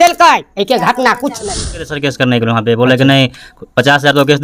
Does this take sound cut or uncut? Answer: cut